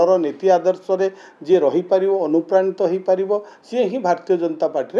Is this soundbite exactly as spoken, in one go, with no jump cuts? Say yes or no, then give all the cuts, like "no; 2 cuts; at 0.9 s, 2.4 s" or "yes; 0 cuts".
yes; 0 cuts